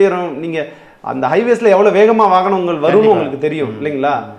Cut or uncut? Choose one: uncut